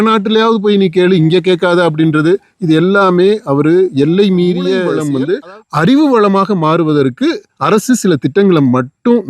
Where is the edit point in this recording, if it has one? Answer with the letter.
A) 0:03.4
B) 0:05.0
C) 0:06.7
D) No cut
B